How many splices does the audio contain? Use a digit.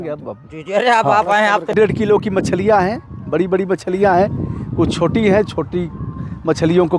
1